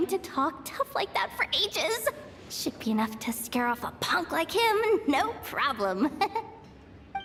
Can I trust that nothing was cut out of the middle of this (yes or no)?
yes